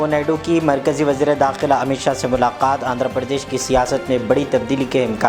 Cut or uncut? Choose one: uncut